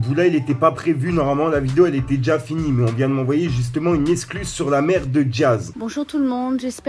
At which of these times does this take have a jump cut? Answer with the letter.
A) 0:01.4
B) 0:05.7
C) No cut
B